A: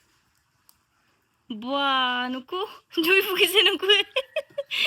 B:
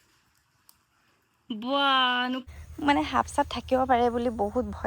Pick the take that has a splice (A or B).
B